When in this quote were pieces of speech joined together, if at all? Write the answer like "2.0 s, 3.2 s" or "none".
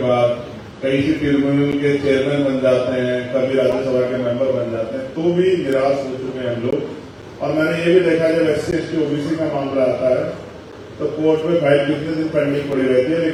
none